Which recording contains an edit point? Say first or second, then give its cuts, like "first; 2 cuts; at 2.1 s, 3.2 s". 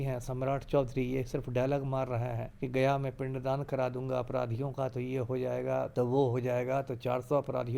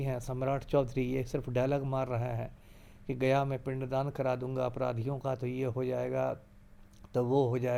first; 2 cuts; at 2.5 s, 5.9 s